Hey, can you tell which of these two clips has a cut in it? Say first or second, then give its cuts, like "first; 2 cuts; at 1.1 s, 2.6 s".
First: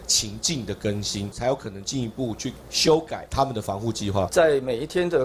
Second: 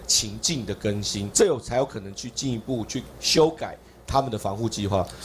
first; 3 cuts; at 1.4 s, 3.2 s, 4.3 s